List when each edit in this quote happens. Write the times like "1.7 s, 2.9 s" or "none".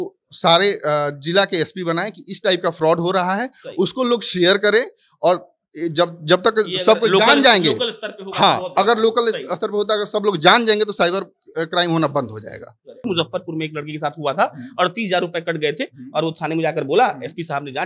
13.0 s